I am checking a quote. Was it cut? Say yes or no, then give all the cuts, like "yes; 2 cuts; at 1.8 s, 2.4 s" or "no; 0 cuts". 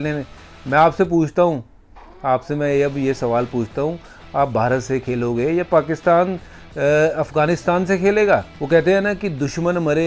yes; 1 cut; at 8.5 s